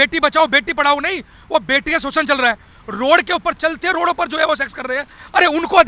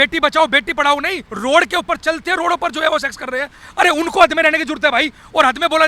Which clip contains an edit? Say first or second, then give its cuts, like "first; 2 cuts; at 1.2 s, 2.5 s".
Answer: second; 1 cut; at 1.2 s